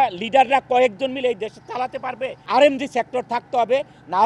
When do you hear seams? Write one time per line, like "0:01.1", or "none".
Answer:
0:02.5